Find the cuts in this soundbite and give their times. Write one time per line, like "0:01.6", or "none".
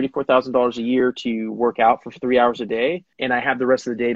0:03.1